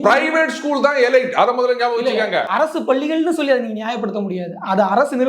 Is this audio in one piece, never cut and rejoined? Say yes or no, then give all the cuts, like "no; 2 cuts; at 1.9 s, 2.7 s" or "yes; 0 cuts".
yes; 0 cuts